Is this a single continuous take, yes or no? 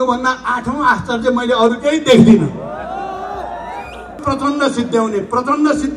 no